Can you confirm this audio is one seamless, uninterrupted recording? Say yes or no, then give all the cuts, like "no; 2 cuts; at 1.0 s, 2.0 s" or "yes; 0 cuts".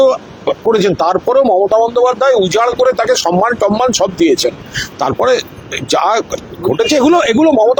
yes; 0 cuts